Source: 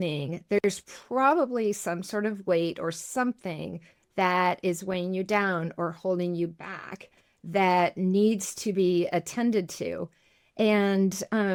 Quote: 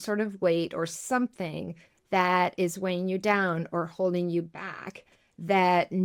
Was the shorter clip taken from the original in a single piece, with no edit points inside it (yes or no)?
yes